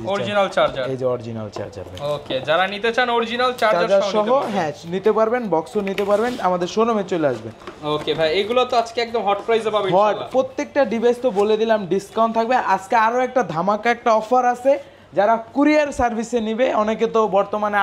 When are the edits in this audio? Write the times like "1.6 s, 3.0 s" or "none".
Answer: none